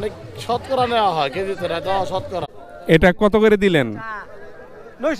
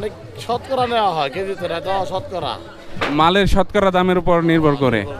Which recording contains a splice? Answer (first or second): first